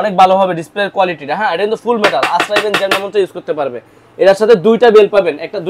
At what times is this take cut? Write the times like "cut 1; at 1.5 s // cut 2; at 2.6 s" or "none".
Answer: none